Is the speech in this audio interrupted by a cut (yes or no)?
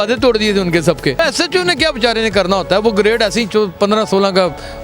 yes